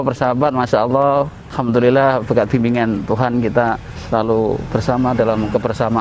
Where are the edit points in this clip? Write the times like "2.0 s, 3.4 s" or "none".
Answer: 1.4 s, 3.9 s